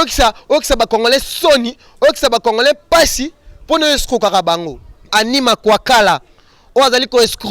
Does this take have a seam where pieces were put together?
yes; 1 cut; at 5.1 s

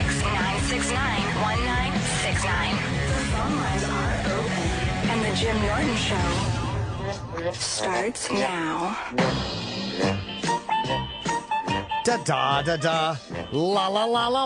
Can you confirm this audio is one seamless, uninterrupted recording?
yes; 0 cuts

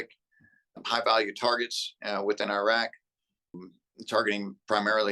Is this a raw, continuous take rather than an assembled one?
no; 2 cuts; at 0.8 s, 3.5 s

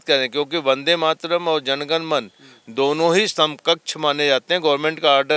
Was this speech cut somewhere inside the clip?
no; 0 cuts

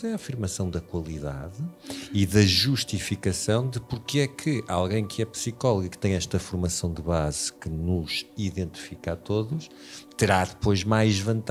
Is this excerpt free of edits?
yes; 0 cuts

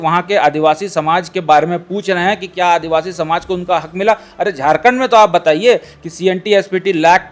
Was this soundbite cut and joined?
no; 0 cuts

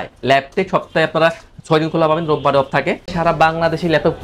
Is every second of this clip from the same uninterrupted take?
no; 1 cut; at 3.1 s

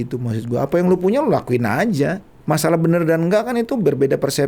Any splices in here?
yes; 1 cut; at 2.3 s

